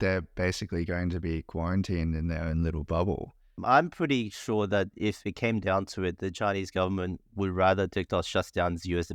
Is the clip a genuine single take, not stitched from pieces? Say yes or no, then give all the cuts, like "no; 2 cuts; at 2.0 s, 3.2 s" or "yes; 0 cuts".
no; 1 cut; at 3.6 s